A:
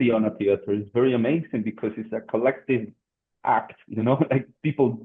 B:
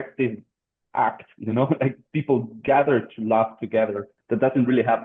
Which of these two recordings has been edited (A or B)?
B